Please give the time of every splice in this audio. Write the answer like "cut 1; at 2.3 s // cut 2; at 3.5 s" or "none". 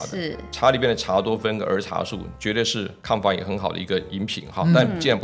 none